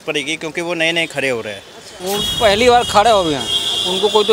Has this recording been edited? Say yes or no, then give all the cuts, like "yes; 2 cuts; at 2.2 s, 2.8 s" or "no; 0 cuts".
yes; 1 cut; at 1.9 s